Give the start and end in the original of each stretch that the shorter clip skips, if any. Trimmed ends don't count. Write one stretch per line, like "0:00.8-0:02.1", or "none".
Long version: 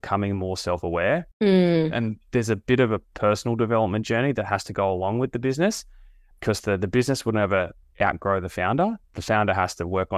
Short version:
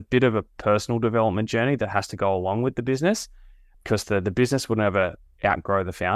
none